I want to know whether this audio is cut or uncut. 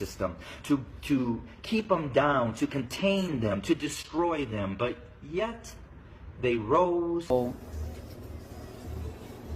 cut